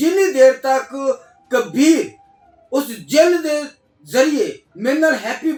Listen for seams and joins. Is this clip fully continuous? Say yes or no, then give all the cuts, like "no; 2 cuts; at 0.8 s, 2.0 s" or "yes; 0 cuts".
yes; 0 cuts